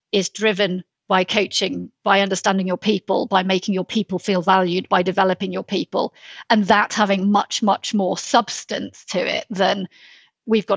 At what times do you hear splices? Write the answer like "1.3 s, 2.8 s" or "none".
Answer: 0.9 s